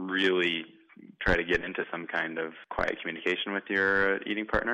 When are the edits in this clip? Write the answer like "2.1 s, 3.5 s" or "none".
2.6 s